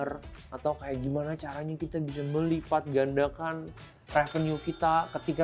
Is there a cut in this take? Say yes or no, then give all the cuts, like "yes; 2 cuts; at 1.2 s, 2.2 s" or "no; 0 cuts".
no; 0 cuts